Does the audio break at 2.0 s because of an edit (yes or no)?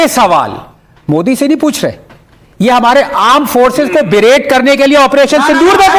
no